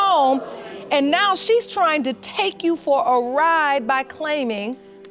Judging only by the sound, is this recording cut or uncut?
uncut